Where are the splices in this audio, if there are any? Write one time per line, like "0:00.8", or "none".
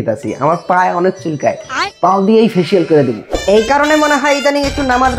0:03.3